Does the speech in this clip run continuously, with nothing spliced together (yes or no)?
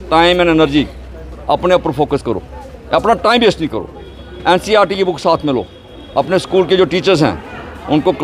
yes